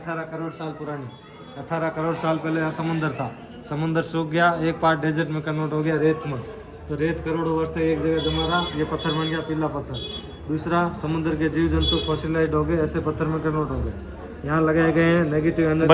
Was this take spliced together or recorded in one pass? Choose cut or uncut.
uncut